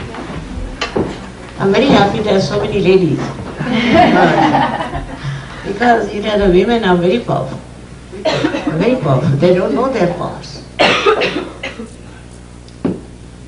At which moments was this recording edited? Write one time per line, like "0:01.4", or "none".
none